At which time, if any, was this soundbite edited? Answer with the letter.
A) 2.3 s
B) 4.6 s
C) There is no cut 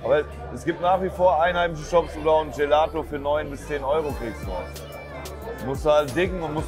C